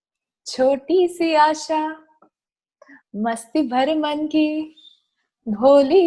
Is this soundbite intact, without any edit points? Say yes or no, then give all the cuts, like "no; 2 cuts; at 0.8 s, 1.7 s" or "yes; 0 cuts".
yes; 0 cuts